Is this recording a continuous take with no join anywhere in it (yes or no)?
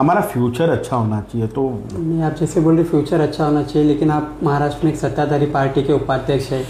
yes